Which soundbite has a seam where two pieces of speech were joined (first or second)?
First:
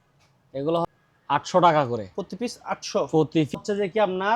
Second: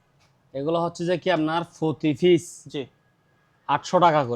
first